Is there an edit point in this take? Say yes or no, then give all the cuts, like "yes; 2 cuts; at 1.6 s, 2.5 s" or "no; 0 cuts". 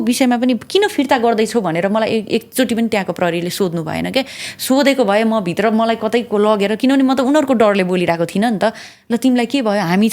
no; 0 cuts